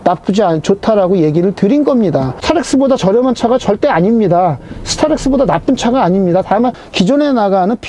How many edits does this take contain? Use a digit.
2